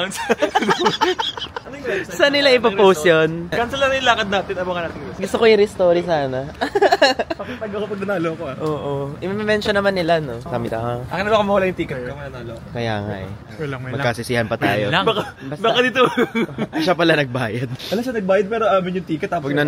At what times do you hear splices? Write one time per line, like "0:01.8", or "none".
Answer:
none